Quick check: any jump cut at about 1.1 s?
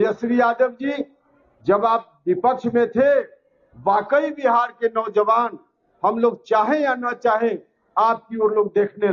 no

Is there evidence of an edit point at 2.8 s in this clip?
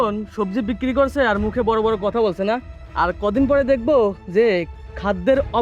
yes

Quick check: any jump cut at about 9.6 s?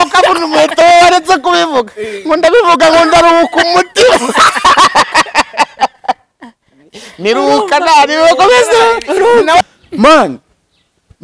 yes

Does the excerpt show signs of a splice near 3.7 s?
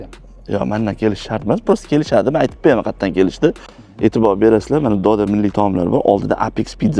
no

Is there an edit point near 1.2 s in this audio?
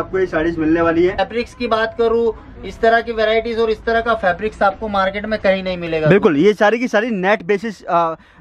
yes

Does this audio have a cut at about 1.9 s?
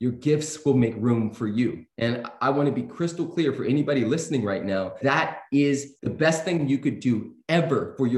yes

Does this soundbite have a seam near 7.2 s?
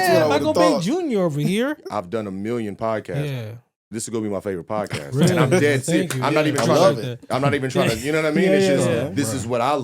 no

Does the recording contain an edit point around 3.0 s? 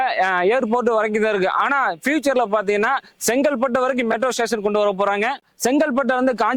no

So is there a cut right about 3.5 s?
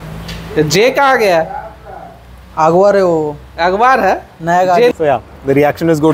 no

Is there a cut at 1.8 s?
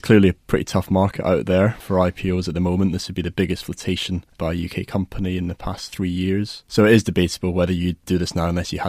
yes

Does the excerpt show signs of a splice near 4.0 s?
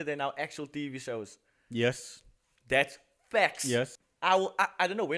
yes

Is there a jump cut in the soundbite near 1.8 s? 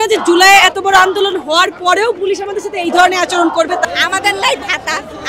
no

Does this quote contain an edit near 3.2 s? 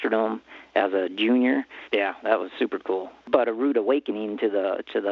yes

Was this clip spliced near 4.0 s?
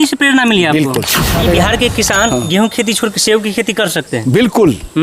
no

